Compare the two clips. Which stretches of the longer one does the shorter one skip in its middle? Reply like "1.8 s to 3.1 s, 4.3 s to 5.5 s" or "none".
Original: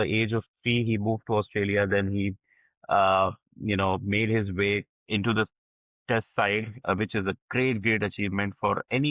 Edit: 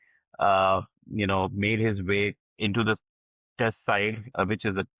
none